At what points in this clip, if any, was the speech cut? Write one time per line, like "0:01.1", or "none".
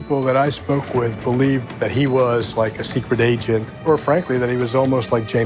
0:01.7
0:03.7